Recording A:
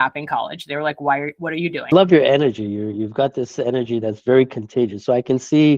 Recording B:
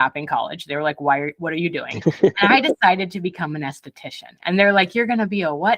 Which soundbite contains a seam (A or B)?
A